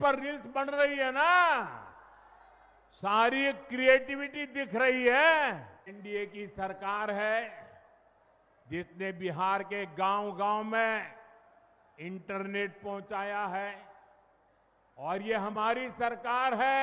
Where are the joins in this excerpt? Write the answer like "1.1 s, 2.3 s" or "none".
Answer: 5.9 s